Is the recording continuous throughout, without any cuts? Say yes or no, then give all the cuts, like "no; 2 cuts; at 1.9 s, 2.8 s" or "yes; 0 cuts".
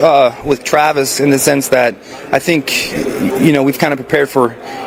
yes; 0 cuts